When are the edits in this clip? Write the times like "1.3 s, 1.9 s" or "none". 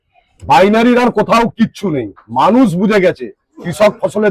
none